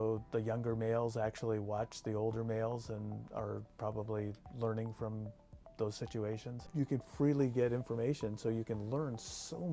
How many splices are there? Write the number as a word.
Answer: one